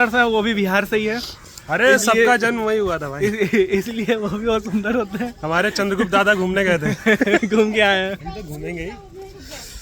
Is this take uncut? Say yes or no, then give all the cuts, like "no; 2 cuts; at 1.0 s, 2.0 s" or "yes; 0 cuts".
yes; 0 cuts